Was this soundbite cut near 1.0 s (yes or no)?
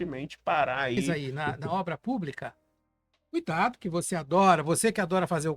yes